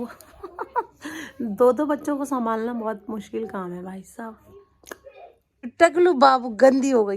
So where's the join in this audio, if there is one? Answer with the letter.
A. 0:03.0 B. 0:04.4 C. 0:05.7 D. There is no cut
C